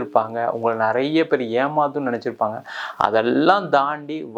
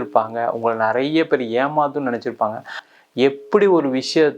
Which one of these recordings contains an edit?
second; 1 cut; at 2.8 s

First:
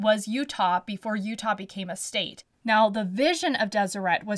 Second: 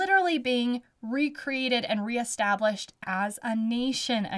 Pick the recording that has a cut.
first; 1 cut; at 2.4 s

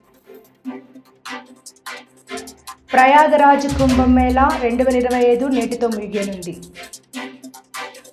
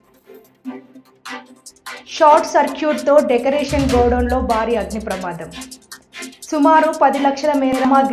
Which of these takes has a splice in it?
second; 1 cut; at 2.0 s

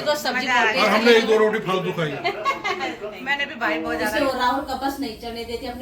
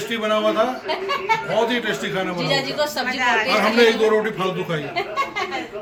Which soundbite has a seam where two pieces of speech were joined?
first; 1 cut; at 4.1 s

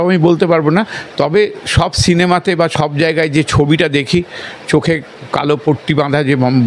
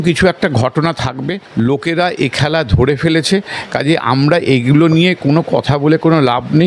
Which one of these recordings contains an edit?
second; 1 cut; at 1.4 s

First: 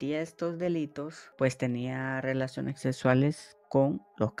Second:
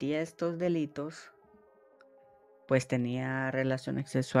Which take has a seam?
first; 1 cut; at 1.2 s

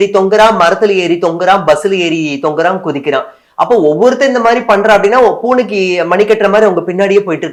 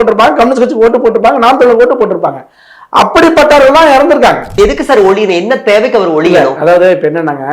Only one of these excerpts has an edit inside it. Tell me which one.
second; 1 cut; at 4.5 s

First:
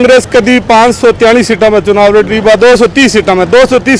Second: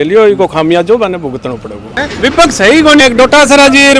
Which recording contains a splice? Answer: second; 2 cuts; at 2.0 s, 3.0 s

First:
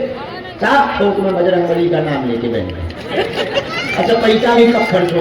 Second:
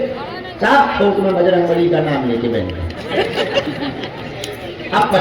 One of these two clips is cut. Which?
second; 1 cut; at 3.6 s

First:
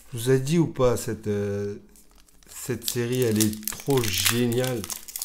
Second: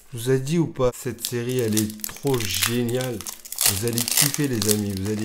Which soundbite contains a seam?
second; 1 cut; at 0.9 s

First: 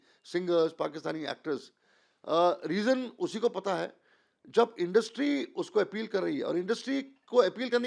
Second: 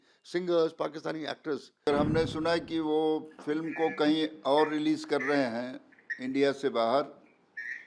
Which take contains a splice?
second; 1 cut; at 1.9 s

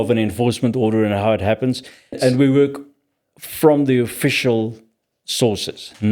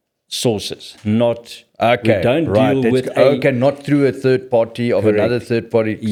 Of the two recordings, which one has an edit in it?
first; 1 cut; at 2.2 s

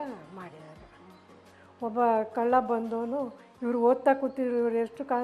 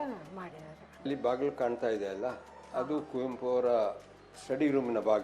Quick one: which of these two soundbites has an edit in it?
first; 1 cut; at 1.2 s

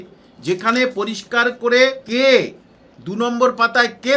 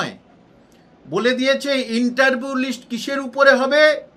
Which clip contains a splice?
first; 1 cut; at 2.0 s

